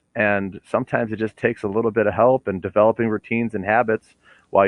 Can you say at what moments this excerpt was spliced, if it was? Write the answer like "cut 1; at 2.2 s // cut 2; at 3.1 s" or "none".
none